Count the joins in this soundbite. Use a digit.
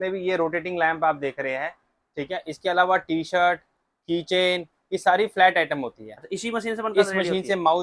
0